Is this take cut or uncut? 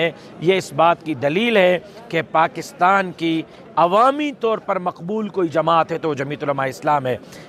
uncut